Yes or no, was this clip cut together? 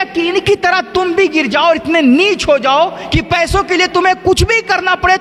no